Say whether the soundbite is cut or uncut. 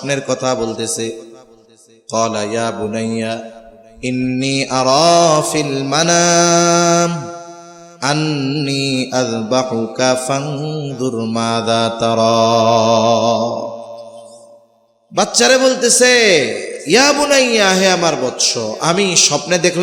uncut